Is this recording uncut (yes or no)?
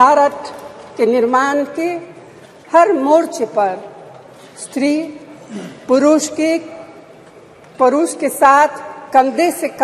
yes